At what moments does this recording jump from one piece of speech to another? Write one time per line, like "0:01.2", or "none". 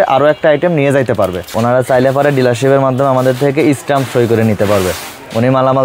0:01.4